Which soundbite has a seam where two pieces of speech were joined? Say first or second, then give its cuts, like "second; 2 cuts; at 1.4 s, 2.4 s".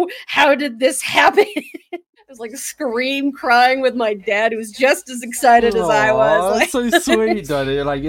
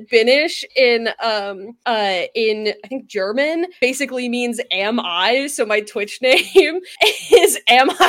first; 1 cut; at 2.2 s